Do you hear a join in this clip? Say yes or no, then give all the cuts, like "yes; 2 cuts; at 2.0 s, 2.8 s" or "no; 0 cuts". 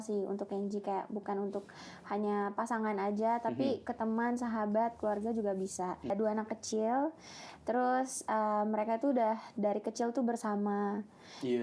yes; 1 cut; at 6.1 s